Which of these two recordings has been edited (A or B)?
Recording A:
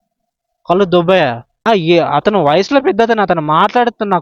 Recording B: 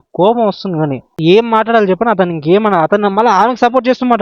B